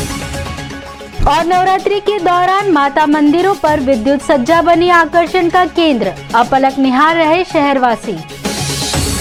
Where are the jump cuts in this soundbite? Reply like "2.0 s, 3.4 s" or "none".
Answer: none